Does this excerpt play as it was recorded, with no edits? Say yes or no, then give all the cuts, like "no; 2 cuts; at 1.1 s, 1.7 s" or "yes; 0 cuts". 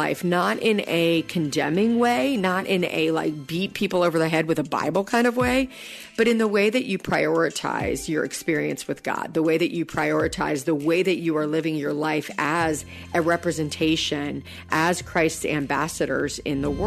yes; 0 cuts